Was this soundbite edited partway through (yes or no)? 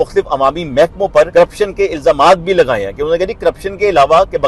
yes